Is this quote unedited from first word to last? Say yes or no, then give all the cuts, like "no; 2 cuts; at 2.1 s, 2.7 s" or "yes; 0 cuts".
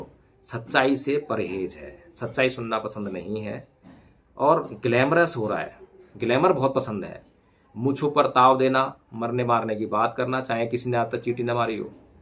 yes; 0 cuts